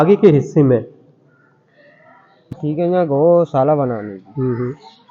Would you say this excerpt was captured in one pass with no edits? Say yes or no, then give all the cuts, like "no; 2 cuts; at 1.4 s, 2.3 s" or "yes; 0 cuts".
no; 1 cut; at 2.5 s